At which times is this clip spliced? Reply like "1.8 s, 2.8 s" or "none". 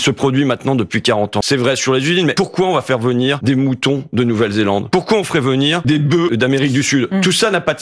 1.4 s, 2.3 s, 3.4 s, 4.8 s, 6.2 s